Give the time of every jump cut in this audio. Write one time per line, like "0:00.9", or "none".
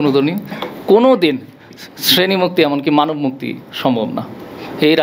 none